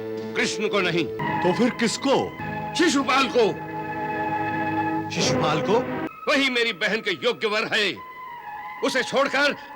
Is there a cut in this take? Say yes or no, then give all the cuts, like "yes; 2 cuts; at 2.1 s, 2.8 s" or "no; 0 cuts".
yes; 3 cuts; at 1.2 s, 2.4 s, 6.1 s